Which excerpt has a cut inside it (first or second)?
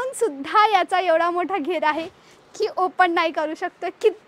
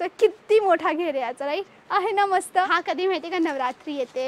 second